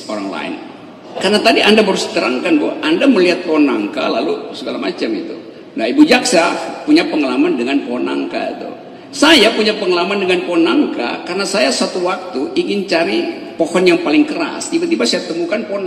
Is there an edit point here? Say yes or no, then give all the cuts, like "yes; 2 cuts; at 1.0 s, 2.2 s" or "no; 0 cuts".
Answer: yes; 1 cut; at 1.1 s